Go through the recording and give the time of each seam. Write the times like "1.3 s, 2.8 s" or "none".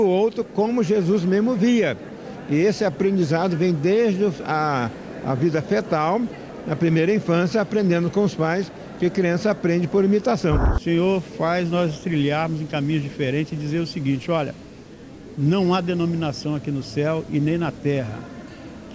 10.7 s